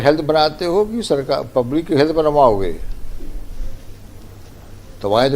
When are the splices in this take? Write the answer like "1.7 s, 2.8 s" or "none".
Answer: none